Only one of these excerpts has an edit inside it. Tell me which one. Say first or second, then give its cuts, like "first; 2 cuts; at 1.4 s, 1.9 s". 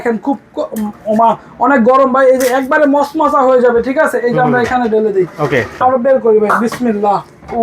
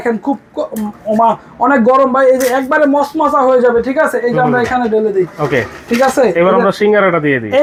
first; 1 cut; at 5.7 s